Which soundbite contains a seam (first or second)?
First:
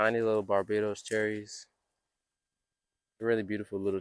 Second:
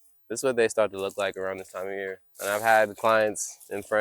second